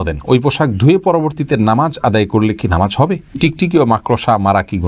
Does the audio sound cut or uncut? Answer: cut